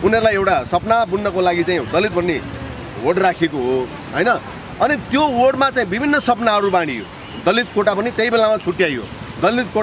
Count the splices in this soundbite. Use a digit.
0